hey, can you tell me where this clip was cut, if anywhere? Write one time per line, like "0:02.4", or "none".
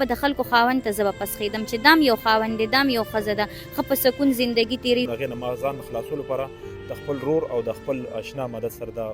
0:05.1